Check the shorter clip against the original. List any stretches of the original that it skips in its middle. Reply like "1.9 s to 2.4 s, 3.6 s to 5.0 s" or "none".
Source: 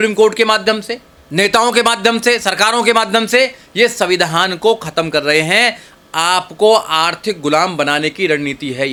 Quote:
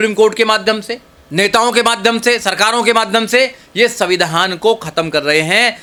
none